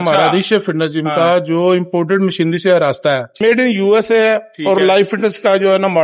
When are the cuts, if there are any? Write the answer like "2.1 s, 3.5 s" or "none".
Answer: 3.3 s